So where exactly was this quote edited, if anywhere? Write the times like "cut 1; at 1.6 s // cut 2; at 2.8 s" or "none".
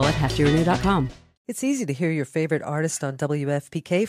cut 1; at 1.5 s